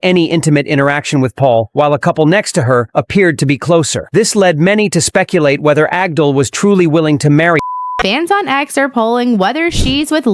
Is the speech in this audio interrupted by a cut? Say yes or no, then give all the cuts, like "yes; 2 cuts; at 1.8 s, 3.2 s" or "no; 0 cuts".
yes; 1 cut; at 7.8 s